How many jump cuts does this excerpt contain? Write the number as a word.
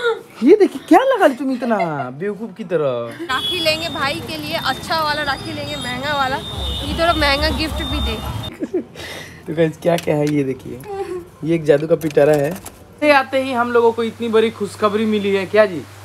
three